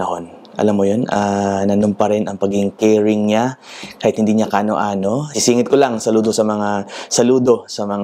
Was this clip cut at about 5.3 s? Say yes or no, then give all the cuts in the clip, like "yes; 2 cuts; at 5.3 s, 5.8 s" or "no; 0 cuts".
yes; 1 cut; at 5.3 s